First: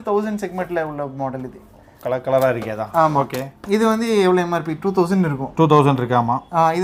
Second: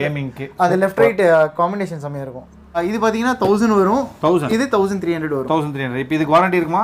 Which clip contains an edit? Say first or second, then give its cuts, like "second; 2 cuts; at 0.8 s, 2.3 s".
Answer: second; 1 cut; at 2.8 s